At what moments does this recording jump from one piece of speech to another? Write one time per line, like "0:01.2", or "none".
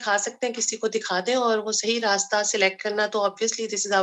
none